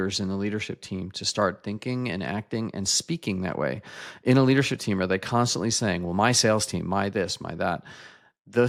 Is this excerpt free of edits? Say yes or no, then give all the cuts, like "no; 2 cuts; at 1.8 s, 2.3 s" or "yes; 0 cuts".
yes; 0 cuts